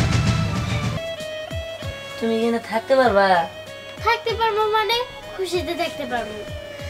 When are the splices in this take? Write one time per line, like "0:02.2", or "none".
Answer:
0:01.0